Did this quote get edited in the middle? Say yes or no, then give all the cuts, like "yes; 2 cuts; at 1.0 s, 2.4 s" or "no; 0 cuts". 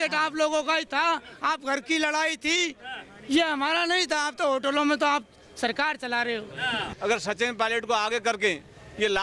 yes; 1 cut; at 6.9 s